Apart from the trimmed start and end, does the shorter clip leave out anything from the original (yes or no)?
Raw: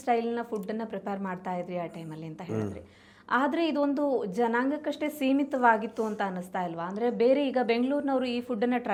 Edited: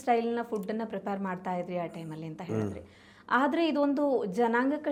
no